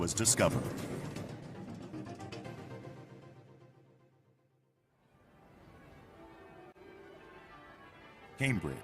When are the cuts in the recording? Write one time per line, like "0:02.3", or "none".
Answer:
0:07.8